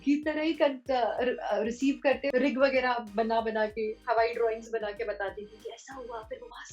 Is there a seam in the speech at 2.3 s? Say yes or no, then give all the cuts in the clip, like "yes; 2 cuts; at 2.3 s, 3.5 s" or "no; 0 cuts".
yes; 1 cut; at 2.3 s